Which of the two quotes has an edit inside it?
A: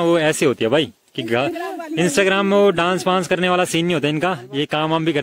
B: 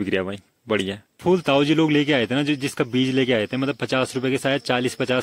B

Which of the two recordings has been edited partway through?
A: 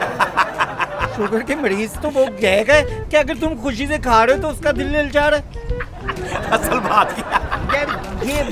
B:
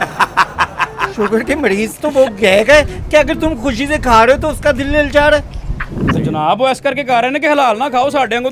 B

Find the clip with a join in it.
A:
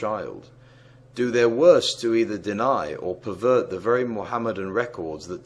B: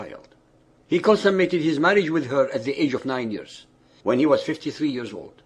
A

